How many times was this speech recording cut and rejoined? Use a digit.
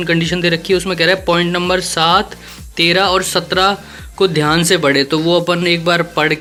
0